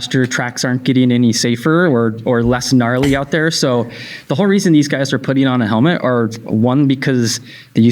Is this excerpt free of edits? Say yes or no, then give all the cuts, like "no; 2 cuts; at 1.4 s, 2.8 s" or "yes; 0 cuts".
yes; 0 cuts